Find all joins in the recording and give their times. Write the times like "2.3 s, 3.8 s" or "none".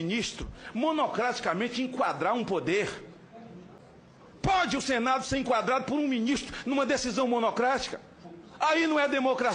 3.8 s